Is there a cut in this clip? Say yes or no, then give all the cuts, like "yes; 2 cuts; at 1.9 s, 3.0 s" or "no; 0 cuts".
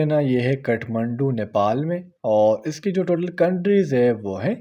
no; 0 cuts